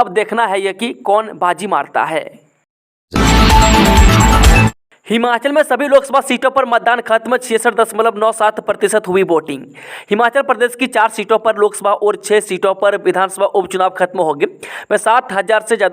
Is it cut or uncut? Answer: cut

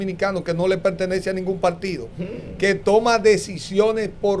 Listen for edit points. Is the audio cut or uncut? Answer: uncut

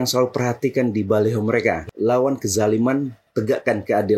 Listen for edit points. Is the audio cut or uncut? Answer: cut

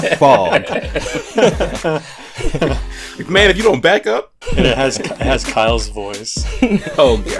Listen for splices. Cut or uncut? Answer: cut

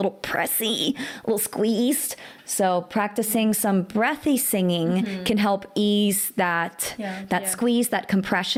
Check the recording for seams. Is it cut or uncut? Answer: uncut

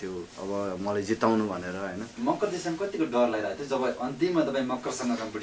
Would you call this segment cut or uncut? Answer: cut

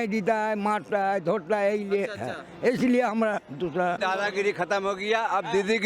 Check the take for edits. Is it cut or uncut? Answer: cut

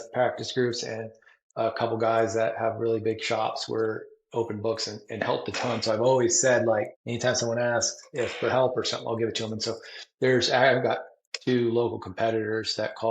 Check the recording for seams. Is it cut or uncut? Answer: cut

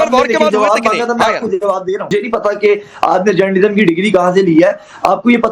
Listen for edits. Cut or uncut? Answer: cut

